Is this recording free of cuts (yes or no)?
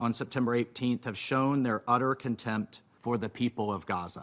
no